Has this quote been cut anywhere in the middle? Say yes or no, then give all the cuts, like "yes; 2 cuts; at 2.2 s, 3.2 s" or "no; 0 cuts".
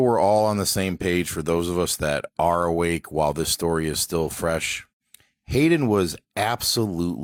no; 0 cuts